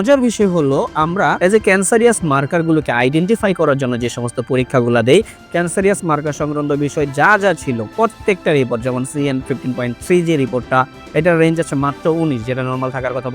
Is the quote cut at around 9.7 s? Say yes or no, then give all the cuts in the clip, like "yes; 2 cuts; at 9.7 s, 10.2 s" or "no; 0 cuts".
no; 1 cut; at 1.4 s